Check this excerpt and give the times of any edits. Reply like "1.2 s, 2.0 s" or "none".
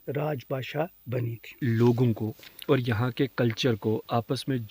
1.6 s